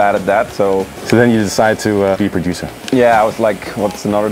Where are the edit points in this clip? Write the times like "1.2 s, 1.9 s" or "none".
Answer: 1.0 s, 2.2 s